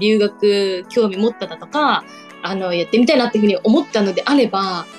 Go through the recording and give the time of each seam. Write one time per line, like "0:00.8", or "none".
none